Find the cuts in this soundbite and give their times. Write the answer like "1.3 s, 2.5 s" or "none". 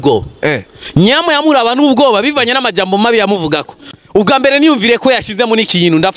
3.7 s